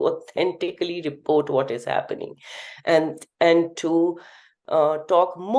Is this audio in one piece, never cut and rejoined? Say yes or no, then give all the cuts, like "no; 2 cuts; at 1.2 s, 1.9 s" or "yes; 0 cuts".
yes; 0 cuts